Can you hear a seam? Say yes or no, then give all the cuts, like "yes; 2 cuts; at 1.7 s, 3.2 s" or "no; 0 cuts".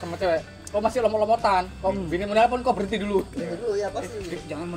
no; 0 cuts